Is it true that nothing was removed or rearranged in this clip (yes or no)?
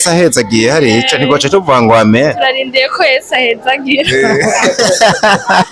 yes